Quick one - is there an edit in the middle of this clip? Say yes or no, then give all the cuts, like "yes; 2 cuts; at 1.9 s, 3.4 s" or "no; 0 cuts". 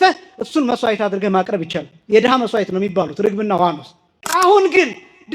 yes; 1 cut; at 4.3 s